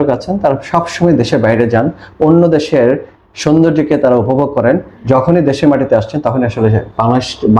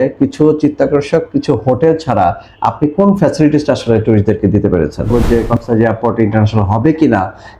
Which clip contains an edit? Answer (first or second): second